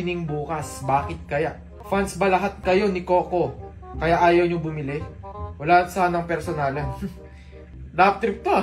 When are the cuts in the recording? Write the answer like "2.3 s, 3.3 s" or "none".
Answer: 1.7 s, 2.6 s